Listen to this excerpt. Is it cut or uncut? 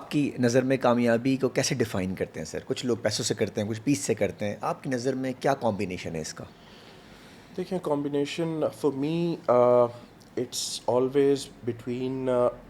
uncut